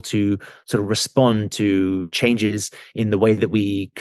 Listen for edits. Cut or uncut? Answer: cut